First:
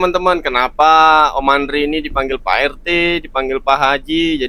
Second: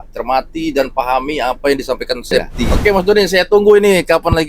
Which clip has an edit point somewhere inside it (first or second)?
second